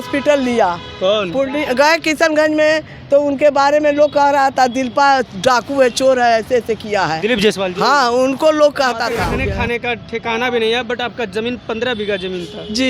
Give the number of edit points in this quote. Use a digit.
1